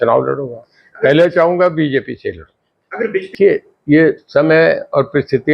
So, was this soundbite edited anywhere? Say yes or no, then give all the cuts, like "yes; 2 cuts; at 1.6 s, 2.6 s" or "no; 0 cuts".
yes; 1 cut; at 3.3 s